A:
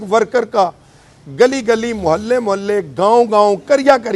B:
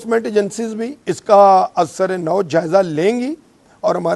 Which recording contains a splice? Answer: B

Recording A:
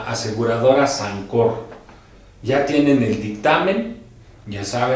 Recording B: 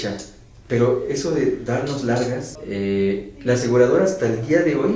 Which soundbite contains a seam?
B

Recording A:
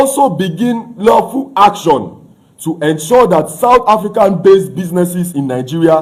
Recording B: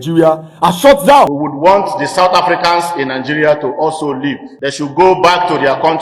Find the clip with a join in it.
B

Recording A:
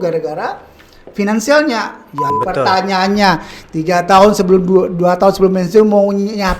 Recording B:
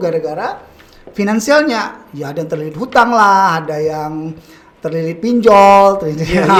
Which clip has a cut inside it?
A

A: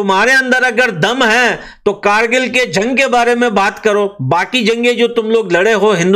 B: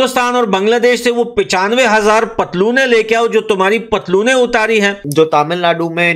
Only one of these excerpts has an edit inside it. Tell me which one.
B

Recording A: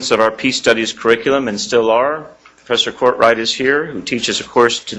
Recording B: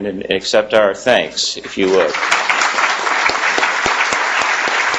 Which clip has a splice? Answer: B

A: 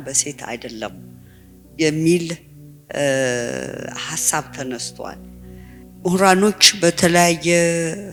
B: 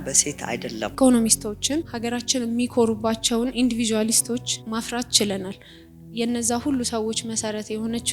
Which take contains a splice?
B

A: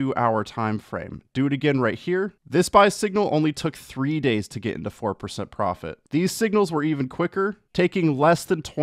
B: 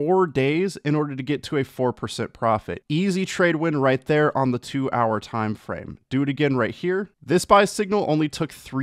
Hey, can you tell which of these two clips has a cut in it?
B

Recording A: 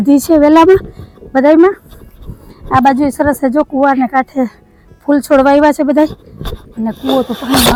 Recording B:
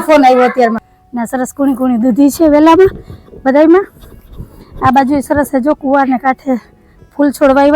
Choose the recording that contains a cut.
B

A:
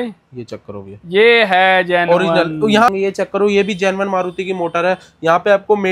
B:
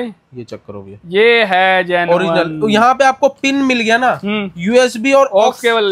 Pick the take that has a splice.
A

